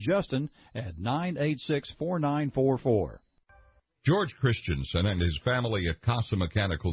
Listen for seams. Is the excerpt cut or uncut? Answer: cut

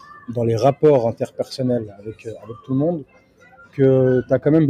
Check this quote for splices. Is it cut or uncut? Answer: uncut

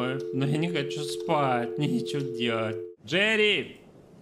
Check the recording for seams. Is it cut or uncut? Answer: cut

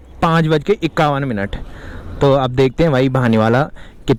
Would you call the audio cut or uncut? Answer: uncut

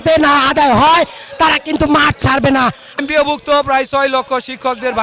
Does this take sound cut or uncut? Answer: cut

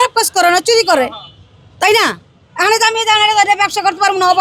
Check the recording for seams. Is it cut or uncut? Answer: uncut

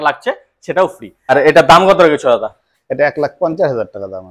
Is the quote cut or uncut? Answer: cut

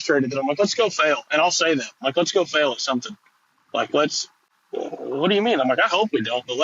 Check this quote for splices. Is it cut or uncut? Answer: uncut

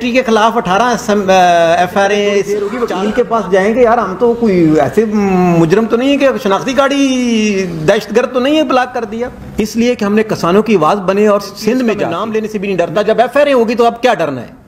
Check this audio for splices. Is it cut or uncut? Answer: cut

